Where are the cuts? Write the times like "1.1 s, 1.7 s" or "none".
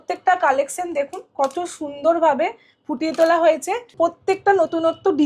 3.9 s